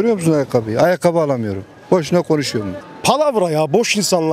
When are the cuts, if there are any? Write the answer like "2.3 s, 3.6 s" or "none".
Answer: 2.7 s